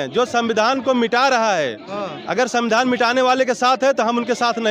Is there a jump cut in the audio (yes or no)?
no